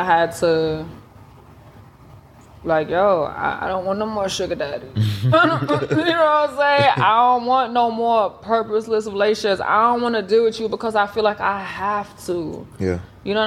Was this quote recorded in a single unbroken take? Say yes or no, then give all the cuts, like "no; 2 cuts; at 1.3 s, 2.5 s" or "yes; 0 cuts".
yes; 0 cuts